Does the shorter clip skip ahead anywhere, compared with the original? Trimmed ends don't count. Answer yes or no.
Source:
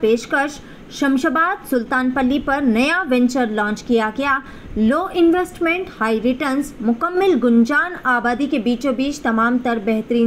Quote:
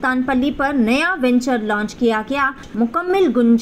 yes